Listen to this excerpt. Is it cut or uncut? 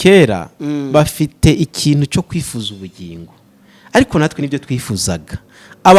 uncut